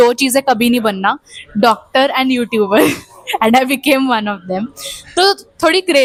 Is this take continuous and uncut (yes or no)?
yes